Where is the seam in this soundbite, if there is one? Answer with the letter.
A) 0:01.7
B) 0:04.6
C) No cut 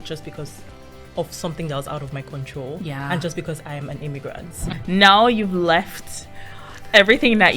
B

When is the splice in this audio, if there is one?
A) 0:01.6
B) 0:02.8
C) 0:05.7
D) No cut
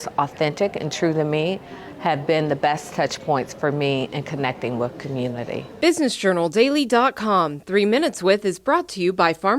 C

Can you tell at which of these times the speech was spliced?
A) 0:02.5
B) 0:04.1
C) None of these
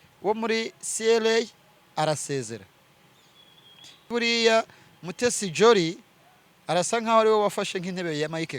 B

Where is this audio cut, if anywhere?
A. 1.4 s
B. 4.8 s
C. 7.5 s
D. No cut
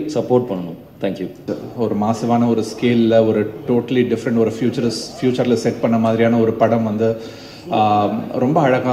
A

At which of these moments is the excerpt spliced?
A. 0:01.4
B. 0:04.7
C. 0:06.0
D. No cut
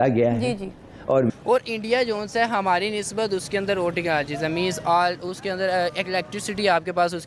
A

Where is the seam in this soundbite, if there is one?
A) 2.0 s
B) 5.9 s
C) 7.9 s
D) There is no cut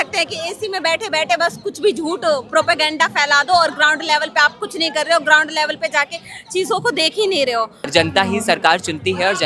C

